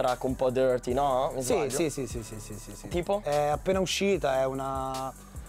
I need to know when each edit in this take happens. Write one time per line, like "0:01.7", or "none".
0:01.8